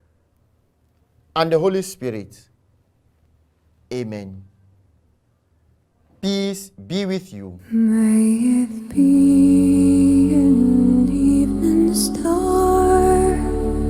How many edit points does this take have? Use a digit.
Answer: 1